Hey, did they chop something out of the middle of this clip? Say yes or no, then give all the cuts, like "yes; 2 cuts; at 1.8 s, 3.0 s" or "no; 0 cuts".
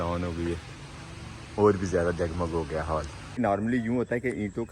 yes; 1 cut; at 3.4 s